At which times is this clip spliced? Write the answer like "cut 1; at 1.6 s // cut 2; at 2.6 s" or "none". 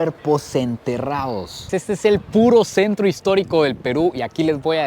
cut 1; at 1.7 s

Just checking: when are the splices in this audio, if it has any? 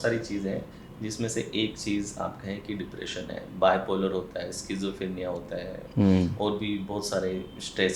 none

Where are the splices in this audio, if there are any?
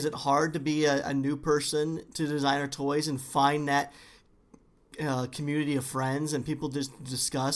none

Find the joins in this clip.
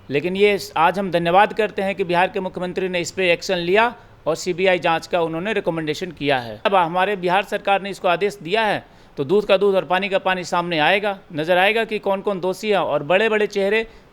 cut 1; at 6.6 s

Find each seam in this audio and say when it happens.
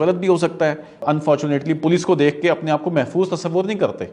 cut 1; at 1.0 s

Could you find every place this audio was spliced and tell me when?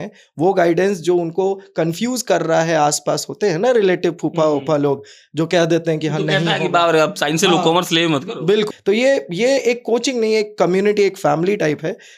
cut 1; at 8.7 s

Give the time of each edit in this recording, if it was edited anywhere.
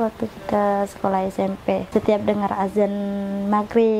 cut 1; at 1.9 s

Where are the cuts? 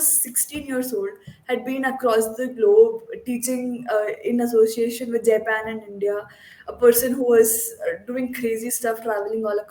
none

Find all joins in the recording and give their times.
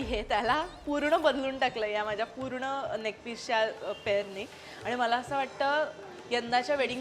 none

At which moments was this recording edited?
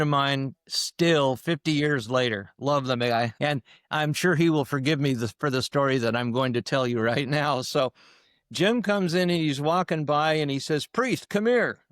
cut 1; at 3.3 s

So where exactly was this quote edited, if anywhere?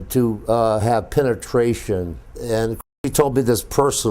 cut 1; at 2.3 s

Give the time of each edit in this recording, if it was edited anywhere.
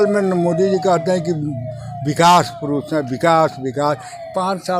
none

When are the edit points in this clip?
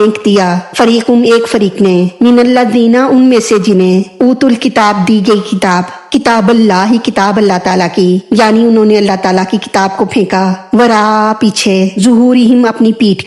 cut 1; at 5.9 s

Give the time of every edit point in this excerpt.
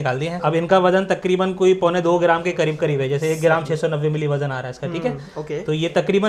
none

